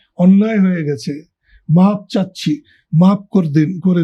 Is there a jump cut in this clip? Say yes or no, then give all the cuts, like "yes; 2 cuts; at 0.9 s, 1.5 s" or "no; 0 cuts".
no; 0 cuts